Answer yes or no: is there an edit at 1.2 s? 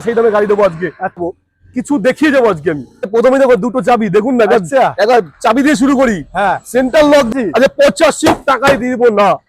yes